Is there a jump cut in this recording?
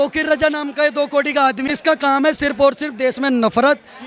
yes; 1 cut; at 1.6 s

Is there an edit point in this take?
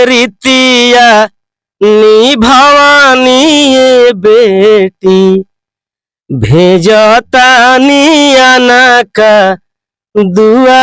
no; 0 cuts

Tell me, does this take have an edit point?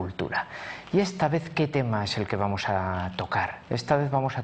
yes; 1 cut; at 3.3 s

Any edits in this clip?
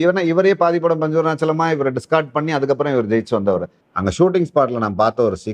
yes; 1 cut; at 3.8 s

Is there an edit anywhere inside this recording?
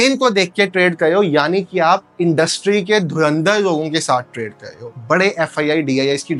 no; 0 cuts

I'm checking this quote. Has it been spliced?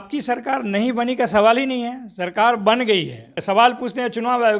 yes; 1 cut; at 3.3 s

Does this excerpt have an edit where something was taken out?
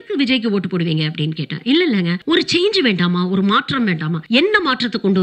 yes; 2 cuts; at 2.2 s, 4.1 s

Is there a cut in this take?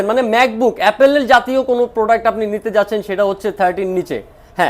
no; 0 cuts

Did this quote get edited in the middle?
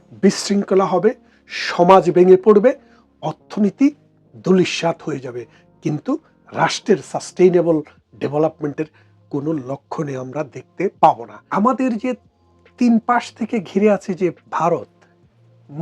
yes; 1 cut; at 11.3 s

